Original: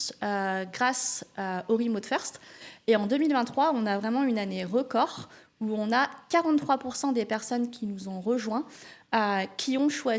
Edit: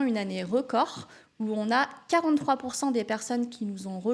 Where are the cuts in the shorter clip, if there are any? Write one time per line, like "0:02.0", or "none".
none

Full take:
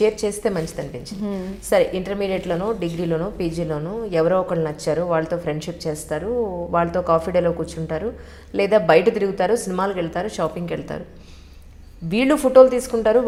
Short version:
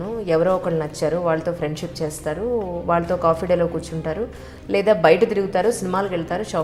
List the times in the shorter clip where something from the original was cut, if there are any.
none

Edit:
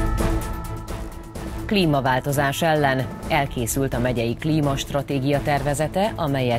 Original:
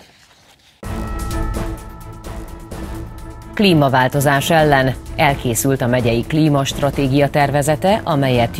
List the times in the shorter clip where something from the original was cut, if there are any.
0:01.6

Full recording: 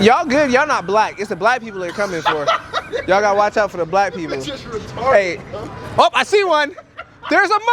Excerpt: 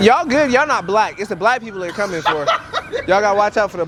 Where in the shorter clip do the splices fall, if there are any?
none

